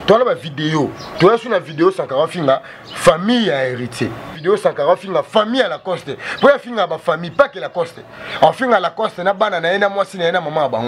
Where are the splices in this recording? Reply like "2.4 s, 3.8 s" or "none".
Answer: 1.0 s, 4.4 s